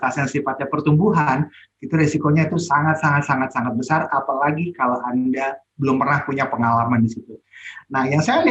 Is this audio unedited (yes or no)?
yes